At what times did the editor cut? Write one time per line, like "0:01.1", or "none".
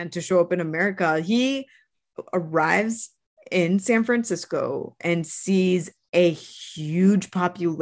none